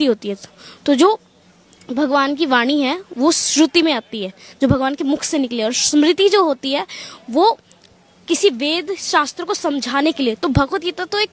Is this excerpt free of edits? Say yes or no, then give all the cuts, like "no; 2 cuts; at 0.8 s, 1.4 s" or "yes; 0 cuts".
yes; 0 cuts